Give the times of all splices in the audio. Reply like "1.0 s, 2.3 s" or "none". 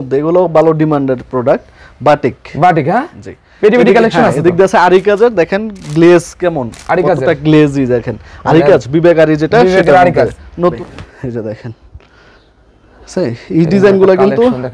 10.8 s